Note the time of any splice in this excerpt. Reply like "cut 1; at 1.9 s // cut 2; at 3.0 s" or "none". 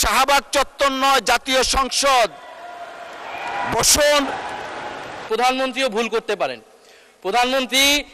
cut 1; at 5.2 s